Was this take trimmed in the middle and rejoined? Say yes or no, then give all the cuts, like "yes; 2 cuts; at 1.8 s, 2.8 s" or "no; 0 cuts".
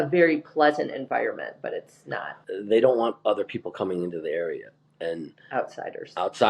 yes; 1 cut; at 2.3 s